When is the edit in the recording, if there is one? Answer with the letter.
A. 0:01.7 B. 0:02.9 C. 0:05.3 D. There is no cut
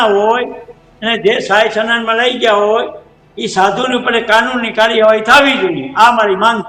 D